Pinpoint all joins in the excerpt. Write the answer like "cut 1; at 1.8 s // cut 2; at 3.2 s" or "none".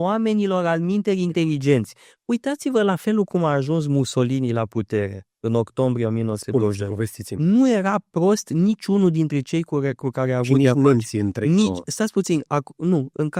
none